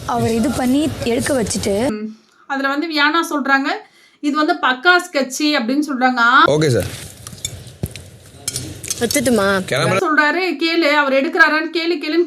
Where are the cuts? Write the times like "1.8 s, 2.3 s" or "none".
1.9 s, 6.5 s, 10.0 s